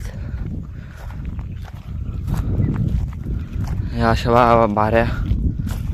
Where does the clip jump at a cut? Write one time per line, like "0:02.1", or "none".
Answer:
none